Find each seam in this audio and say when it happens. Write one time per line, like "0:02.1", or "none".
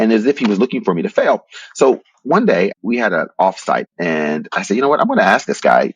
0:02.7
0:03.9